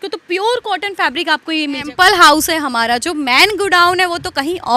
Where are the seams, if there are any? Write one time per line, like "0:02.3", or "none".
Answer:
0:01.8